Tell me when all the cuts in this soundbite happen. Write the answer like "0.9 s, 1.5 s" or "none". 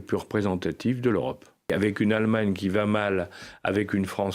1.7 s